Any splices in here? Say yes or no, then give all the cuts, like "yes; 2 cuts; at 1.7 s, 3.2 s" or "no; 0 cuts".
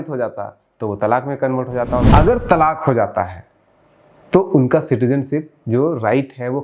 yes; 1 cut; at 2.1 s